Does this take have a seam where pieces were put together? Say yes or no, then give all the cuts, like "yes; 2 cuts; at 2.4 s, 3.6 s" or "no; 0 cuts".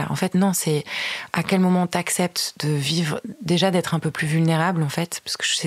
no; 0 cuts